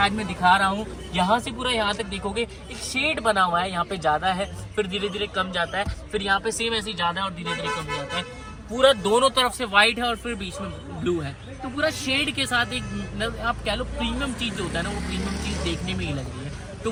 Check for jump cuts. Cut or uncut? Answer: uncut